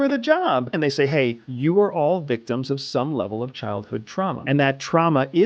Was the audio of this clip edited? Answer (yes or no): yes